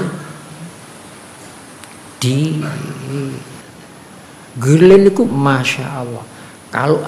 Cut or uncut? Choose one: cut